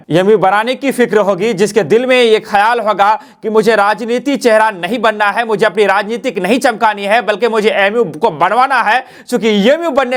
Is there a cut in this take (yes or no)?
no